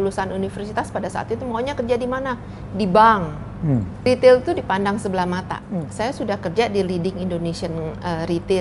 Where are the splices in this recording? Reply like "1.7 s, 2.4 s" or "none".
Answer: 4.0 s, 5.6 s